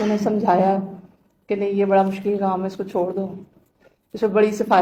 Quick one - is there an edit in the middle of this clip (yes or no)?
no